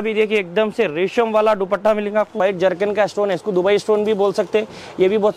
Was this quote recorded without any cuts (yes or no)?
no